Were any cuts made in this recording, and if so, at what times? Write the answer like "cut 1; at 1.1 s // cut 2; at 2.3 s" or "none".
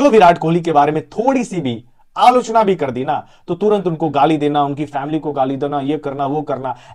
none